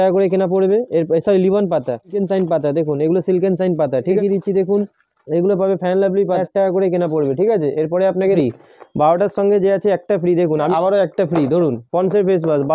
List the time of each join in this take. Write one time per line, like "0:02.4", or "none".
0:02.1
0:04.2
0:06.4
0:08.4
0:10.7